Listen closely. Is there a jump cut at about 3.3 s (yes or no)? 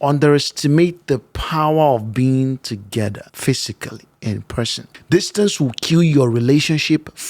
yes